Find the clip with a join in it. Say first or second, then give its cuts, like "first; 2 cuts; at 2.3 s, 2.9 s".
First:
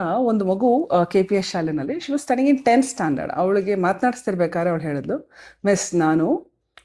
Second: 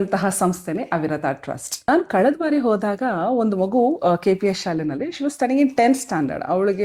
second; 1 cut; at 1.9 s